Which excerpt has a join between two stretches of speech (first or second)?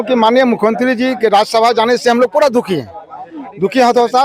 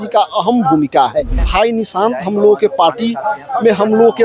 second